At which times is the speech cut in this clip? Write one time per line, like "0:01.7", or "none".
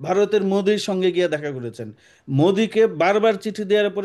none